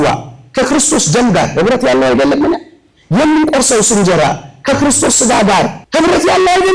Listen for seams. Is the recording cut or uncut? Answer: cut